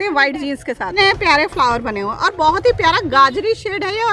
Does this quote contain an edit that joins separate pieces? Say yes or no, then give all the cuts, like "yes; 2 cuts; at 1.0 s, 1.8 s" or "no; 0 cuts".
yes; 1 cut; at 1.0 s